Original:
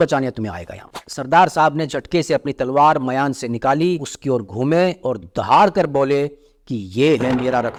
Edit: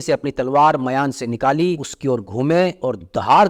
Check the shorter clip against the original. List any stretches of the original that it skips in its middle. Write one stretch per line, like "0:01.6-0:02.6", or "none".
none